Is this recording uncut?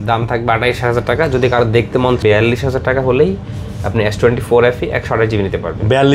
no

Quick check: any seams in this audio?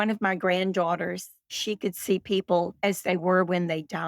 yes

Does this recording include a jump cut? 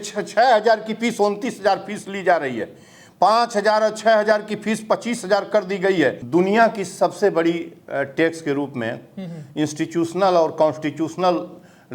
yes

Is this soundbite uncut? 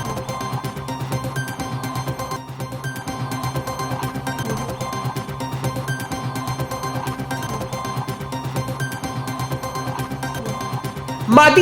yes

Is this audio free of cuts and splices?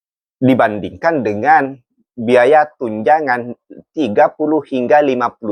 yes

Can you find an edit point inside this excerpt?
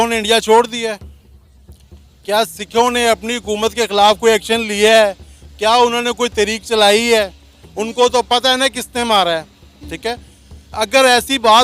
no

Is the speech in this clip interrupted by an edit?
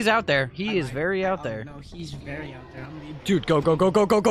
no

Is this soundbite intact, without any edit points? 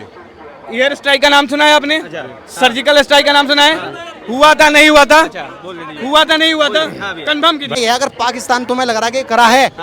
no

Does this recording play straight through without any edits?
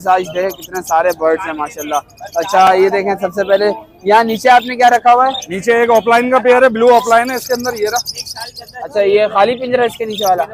yes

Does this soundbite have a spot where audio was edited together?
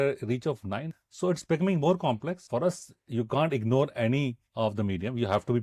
yes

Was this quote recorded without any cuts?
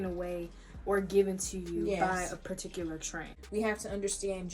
no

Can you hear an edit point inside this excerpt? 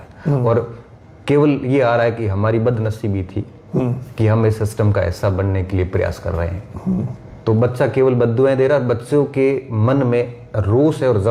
no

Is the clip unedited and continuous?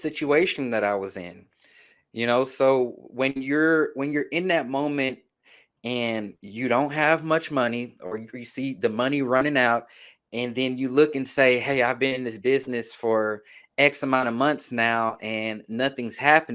yes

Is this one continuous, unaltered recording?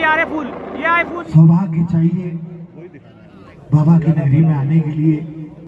no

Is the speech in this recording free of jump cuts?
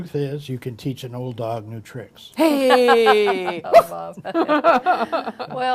yes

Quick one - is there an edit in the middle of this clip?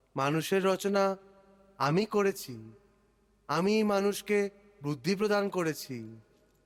no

